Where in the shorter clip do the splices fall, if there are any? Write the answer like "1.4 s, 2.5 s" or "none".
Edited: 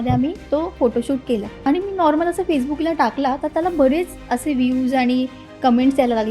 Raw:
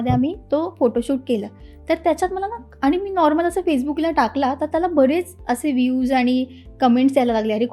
1.5 s